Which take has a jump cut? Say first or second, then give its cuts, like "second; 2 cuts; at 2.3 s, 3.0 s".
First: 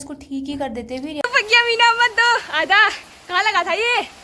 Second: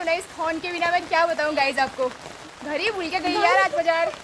first; 1 cut; at 1.2 s